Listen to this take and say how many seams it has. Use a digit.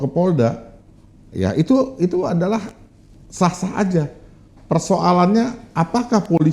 0